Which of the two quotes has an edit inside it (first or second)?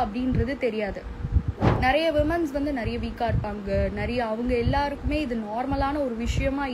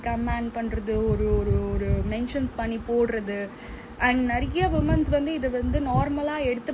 first